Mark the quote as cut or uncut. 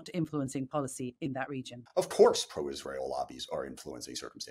cut